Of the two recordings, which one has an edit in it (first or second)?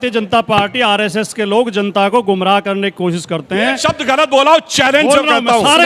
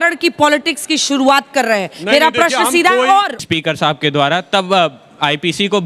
second